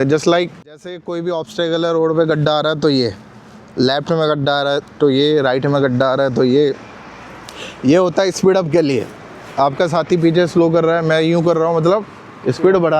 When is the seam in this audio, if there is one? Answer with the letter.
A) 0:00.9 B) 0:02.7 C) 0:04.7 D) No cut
A